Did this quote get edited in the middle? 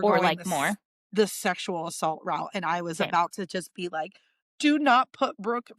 no; 0 cuts

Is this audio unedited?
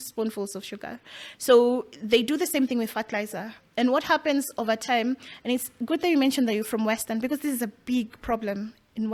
yes; 0 cuts

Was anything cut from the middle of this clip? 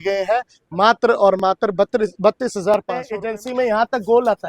yes; 1 cut; at 3.1 s

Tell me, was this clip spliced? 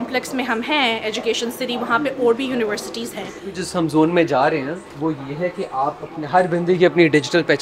yes; 1 cut; at 3.6 s

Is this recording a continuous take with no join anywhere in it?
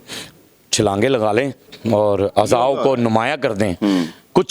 no; 1 cut; at 1.7 s

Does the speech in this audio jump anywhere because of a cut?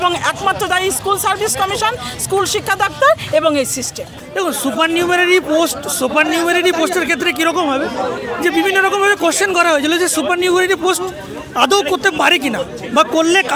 yes; 1 cut; at 4.2 s

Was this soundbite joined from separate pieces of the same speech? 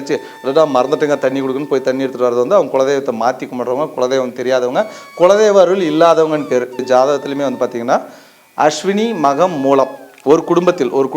yes; 1 cut; at 6.8 s

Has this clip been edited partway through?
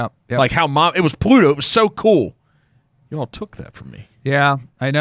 no; 0 cuts

